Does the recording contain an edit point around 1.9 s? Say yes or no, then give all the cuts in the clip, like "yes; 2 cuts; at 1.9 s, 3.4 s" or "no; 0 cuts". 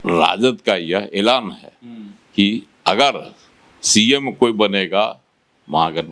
no; 0 cuts